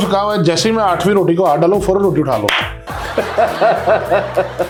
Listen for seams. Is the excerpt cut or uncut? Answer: uncut